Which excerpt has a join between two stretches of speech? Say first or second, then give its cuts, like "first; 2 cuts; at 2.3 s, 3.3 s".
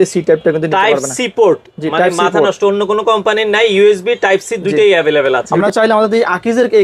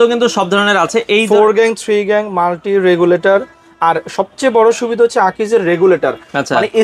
first; 1 cut; at 5.5 s